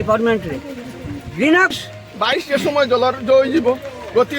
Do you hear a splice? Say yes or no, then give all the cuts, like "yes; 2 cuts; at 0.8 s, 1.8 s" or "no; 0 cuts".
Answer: yes; 1 cut; at 1.7 s